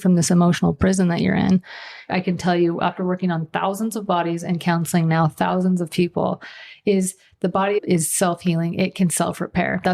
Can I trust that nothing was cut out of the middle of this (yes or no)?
no